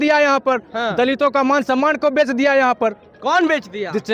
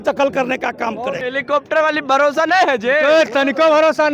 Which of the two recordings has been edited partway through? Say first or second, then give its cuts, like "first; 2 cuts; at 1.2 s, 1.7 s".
second; 1 cut; at 1.2 s